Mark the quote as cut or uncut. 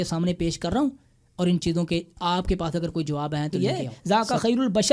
cut